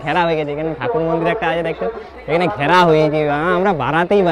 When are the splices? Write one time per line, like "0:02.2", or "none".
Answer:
none